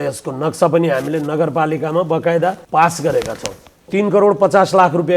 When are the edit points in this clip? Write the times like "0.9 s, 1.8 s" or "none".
2.6 s, 3.9 s